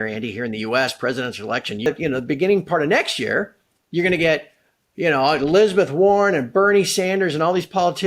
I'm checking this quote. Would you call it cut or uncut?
cut